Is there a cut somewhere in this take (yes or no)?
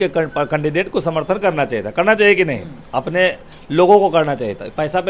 no